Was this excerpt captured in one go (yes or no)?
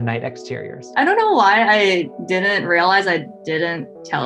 no